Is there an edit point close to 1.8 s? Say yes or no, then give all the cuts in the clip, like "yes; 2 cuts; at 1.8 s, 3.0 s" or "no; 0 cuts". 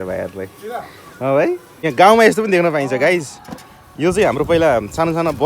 yes; 1 cut; at 1.8 s